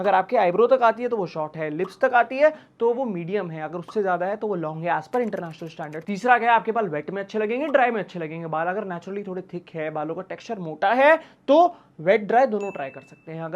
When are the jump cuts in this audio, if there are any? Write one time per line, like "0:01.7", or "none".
none